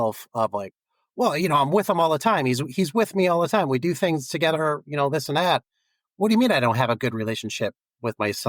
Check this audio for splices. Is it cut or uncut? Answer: uncut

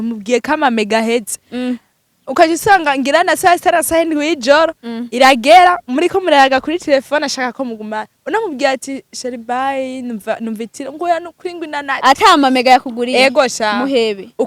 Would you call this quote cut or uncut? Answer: uncut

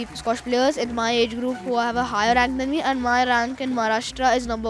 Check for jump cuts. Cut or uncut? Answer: uncut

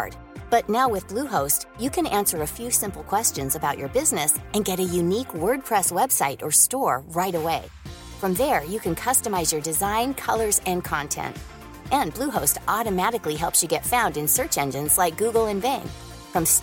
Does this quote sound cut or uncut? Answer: uncut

